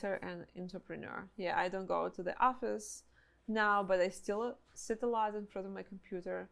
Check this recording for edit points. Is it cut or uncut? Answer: uncut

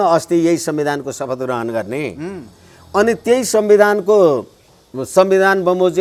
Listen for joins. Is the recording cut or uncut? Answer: uncut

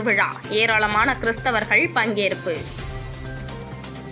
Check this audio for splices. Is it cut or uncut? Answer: uncut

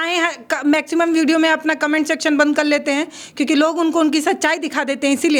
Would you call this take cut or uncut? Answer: uncut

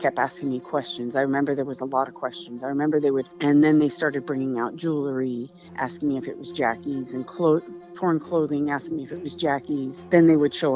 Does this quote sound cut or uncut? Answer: cut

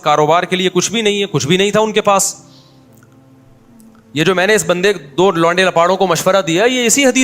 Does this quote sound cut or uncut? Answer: uncut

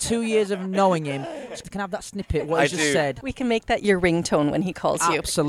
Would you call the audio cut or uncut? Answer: cut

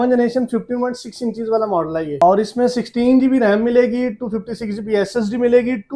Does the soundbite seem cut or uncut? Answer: uncut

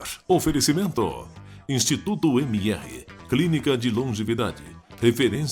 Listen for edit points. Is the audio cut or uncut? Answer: uncut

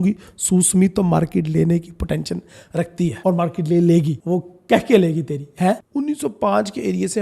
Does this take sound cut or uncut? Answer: cut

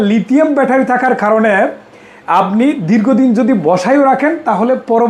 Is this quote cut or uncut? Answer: uncut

